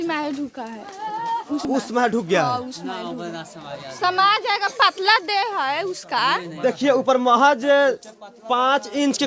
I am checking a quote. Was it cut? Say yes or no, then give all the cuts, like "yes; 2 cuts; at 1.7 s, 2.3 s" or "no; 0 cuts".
yes; 1 cut; at 1.7 s